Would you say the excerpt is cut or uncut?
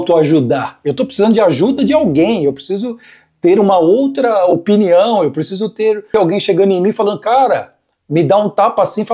cut